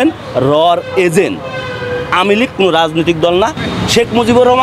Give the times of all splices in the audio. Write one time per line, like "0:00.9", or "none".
0:03.6